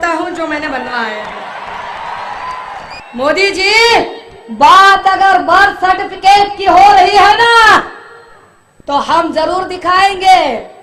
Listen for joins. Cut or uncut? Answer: cut